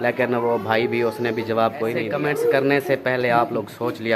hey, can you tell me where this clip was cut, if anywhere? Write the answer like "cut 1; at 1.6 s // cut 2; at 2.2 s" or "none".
cut 1; at 2.1 s